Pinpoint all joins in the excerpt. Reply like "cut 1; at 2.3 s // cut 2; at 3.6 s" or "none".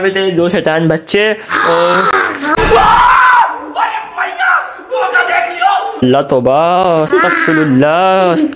none